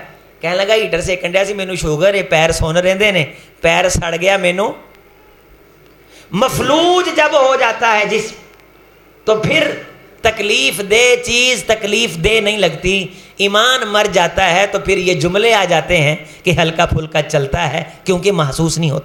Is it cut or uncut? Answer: uncut